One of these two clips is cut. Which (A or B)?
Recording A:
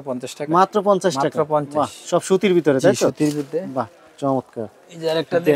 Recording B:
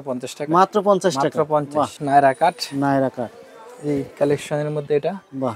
B